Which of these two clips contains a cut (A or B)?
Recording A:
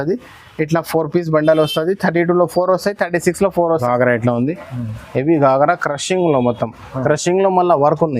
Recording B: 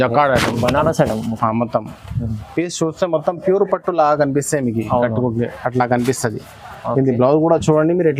A